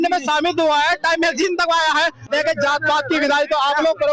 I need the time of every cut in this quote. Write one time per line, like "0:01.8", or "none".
0:02.2